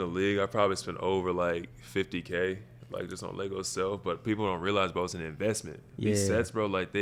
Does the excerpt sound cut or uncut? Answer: uncut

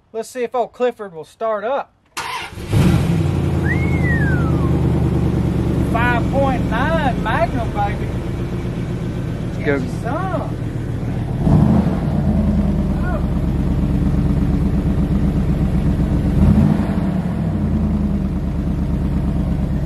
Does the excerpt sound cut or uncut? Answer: uncut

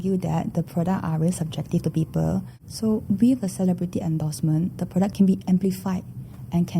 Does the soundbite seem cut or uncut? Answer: cut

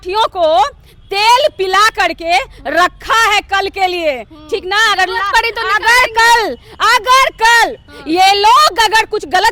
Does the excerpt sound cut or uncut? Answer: uncut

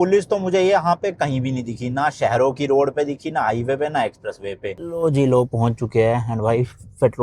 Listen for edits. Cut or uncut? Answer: cut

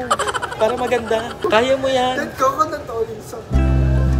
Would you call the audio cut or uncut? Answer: cut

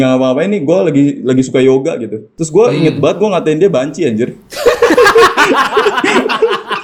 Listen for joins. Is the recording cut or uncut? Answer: uncut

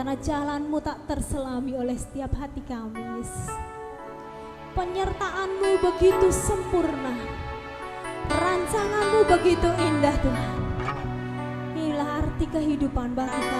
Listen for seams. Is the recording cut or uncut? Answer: uncut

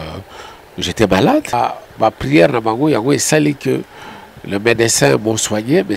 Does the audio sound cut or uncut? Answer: cut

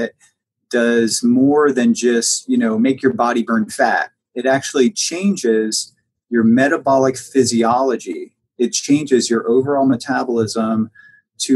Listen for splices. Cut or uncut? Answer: uncut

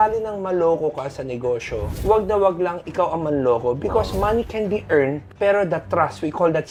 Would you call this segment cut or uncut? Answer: uncut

